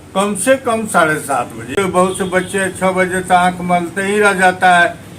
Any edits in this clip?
yes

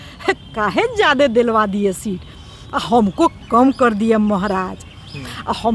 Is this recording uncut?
yes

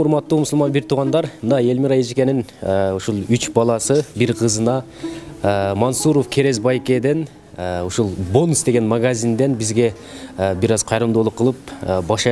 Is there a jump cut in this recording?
no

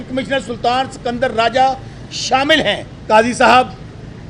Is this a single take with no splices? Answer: no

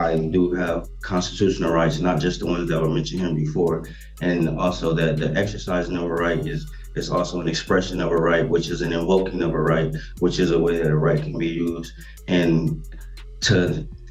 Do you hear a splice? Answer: no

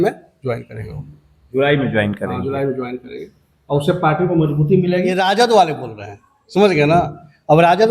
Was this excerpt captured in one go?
no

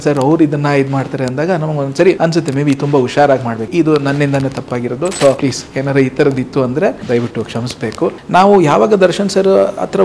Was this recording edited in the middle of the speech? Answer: yes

